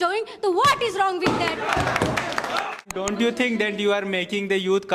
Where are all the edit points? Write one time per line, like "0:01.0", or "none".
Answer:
0:02.9